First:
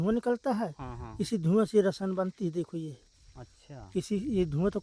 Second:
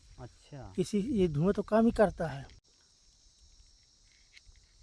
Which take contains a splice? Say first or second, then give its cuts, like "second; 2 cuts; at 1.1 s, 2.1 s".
second; 1 cut; at 2.6 s